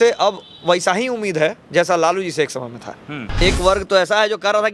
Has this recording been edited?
yes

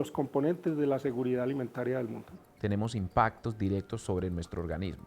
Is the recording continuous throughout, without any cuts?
no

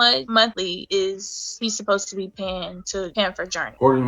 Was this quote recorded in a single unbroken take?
no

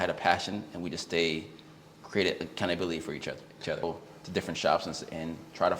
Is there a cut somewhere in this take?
yes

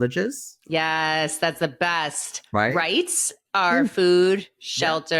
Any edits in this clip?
no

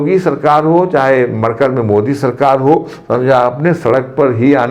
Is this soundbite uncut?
yes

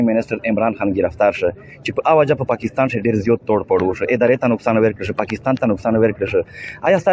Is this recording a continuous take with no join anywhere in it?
yes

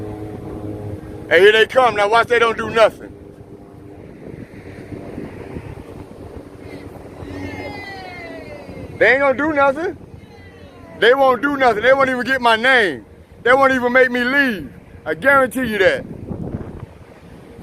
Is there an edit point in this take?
no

